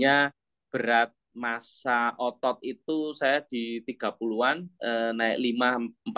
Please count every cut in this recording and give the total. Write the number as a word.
one